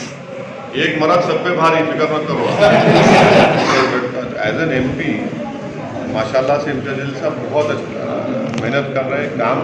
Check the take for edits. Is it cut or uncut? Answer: cut